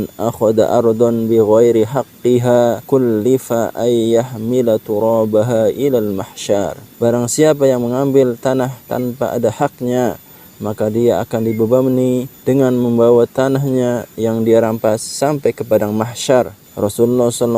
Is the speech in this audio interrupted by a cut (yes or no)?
yes